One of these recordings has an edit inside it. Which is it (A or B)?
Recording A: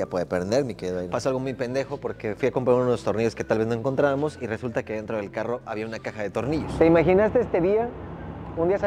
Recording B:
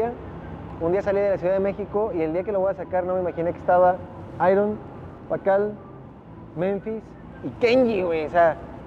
A